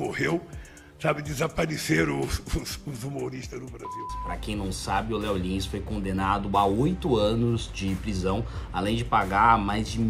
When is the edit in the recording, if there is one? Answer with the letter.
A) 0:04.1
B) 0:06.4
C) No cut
A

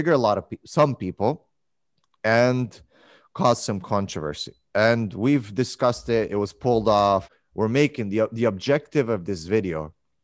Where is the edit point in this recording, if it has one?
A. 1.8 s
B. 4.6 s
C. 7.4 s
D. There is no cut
C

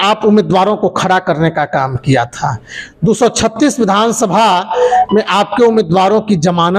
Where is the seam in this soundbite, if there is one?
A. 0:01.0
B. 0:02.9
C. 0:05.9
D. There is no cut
D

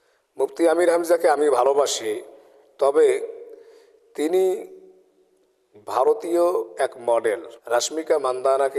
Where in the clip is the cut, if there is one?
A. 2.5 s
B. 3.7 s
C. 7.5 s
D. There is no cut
C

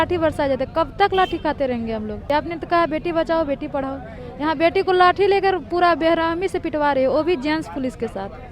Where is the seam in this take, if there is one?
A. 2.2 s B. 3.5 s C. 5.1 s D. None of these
A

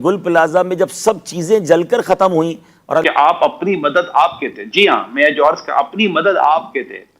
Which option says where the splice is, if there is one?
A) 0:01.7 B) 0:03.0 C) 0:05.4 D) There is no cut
B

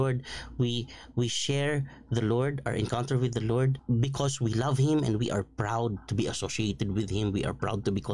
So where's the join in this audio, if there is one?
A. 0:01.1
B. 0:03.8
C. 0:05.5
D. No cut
B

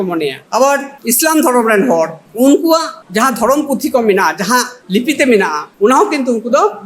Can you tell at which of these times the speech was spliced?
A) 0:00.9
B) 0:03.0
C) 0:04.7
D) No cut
A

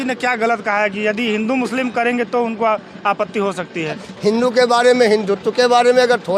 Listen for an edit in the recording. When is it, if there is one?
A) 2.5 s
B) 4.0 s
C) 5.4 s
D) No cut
B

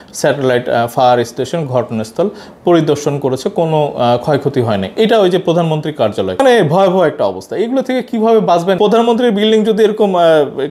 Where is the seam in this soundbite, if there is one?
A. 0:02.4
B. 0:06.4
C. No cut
B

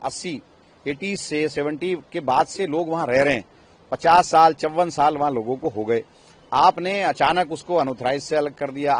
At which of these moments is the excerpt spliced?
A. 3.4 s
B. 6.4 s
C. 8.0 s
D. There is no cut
D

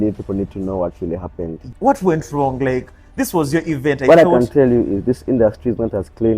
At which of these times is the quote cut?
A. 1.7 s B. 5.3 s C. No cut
A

